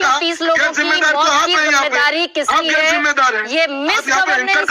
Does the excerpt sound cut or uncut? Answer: uncut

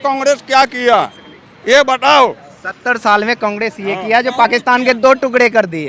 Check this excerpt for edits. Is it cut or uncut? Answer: uncut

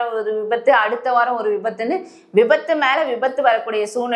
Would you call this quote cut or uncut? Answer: uncut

